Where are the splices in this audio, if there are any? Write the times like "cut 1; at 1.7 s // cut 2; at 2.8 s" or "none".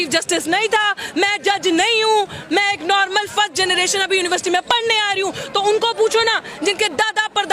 none

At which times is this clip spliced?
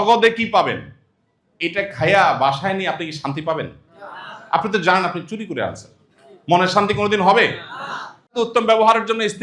cut 1; at 8.3 s

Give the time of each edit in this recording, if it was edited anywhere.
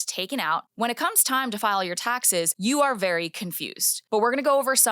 cut 1; at 2.5 s // cut 2; at 3.9 s

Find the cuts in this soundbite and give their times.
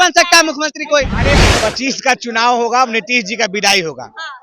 cut 1; at 1.4 s

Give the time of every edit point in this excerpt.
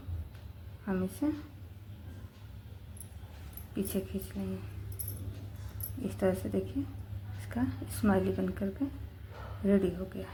none

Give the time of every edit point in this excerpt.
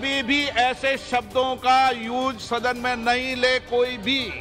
none

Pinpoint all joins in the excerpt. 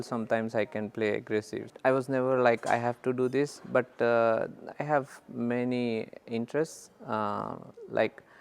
cut 1; at 1.6 s

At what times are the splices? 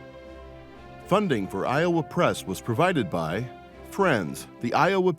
cut 1; at 1.1 s

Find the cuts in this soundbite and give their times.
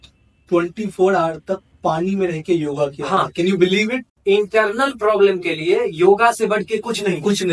cut 1; at 4.1 s

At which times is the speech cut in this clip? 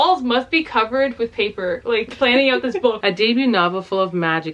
cut 1; at 3.0 s

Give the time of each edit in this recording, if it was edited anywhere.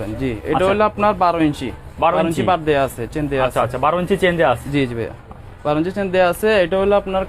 none

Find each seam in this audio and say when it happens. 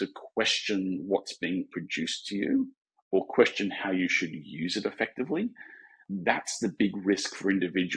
cut 1; at 6.0 s

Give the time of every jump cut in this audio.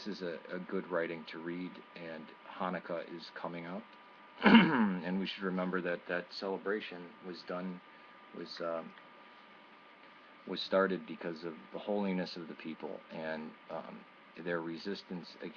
cut 1; at 9.7 s

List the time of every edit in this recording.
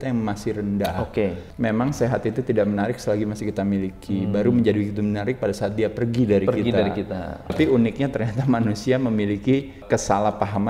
cut 1; at 1.5 s // cut 2; at 7.5 s

